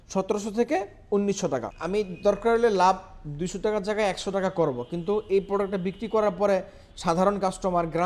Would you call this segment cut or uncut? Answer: cut